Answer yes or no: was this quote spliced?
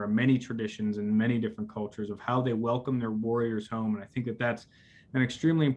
no